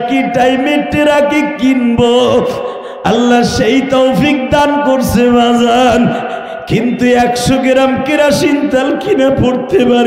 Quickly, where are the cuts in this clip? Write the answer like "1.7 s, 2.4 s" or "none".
none